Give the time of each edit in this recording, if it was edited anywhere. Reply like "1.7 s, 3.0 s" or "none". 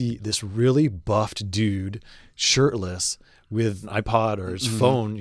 3.9 s